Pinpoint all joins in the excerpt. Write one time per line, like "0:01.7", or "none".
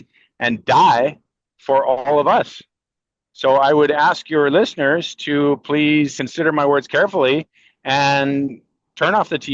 0:06.2